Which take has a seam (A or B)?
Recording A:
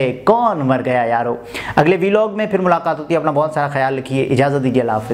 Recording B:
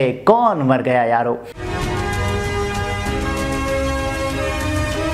B